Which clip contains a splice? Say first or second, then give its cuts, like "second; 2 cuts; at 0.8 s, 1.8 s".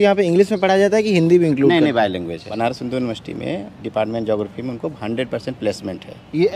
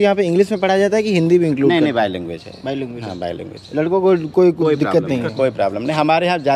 first; 1 cut; at 2.6 s